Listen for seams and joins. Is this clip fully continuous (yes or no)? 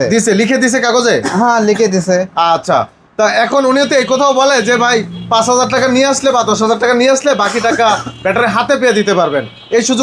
yes